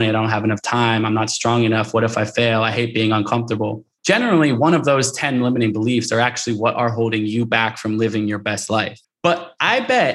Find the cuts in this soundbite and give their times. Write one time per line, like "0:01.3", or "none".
0:03.9
0:09.0